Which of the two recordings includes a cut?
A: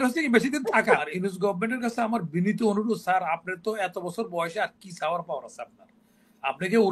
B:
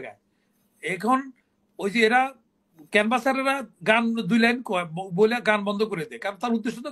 A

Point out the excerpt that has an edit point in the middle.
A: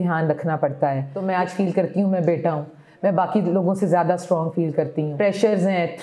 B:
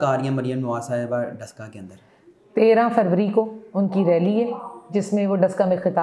A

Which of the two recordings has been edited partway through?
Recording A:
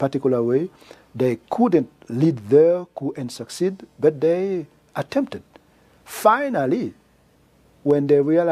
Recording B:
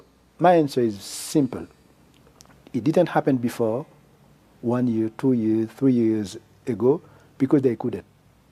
A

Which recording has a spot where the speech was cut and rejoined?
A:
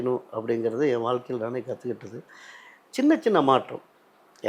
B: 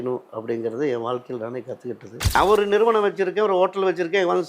B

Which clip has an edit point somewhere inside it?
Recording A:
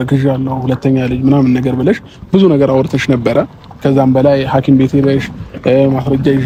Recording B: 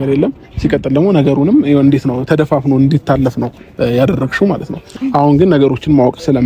B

